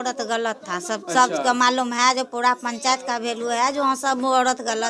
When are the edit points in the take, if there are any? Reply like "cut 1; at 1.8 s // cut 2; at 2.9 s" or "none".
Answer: none